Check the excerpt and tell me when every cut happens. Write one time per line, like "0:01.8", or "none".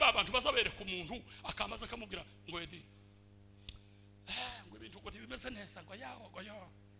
none